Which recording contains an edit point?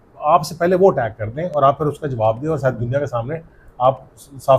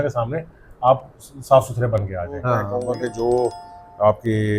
second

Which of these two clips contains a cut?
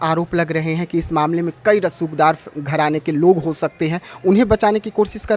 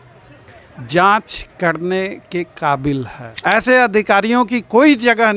second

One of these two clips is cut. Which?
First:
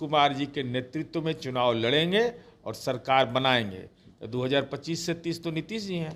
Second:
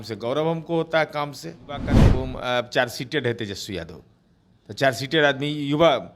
second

